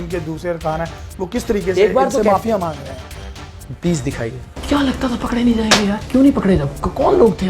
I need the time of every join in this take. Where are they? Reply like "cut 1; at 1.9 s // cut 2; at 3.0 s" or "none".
cut 1; at 4.5 s